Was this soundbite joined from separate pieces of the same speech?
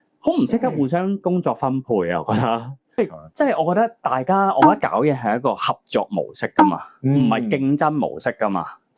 no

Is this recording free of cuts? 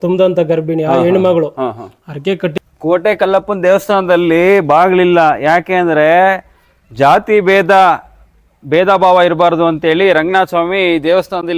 no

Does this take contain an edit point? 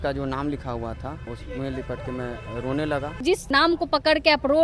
yes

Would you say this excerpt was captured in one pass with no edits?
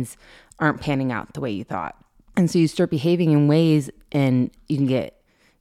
yes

